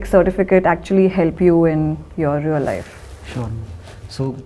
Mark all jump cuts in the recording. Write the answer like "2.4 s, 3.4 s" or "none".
none